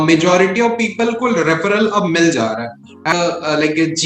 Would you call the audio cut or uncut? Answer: cut